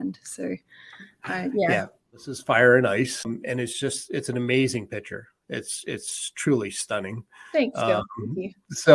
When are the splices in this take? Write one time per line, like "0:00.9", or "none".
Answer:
0:02.3
0:03.2